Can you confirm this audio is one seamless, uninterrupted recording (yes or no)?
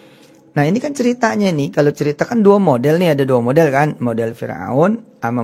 yes